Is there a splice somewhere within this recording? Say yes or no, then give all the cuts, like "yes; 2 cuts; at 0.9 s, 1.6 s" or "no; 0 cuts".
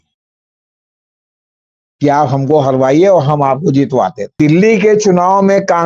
yes; 1 cut; at 4.2 s